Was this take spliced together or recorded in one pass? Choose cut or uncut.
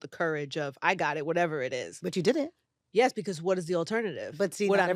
uncut